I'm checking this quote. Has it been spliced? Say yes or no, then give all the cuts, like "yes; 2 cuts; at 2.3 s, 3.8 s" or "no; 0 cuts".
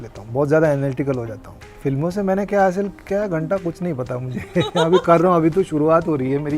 yes; 1 cut; at 1.6 s